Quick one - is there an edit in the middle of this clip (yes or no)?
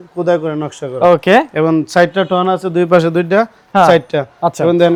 no